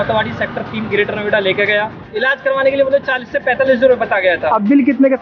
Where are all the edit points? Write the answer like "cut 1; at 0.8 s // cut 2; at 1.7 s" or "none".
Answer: cut 1; at 2.0 s